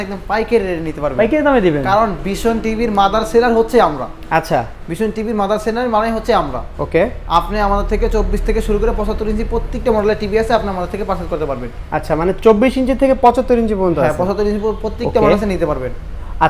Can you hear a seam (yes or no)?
no